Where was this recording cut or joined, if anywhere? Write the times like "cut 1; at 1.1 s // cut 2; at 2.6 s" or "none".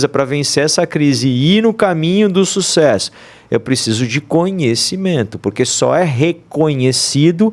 none